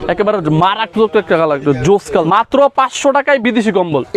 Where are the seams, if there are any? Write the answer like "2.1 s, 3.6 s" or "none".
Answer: 2.2 s